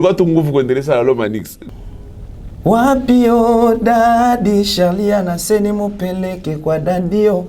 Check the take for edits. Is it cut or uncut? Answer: cut